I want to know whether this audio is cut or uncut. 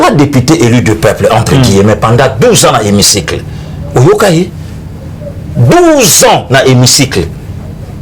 uncut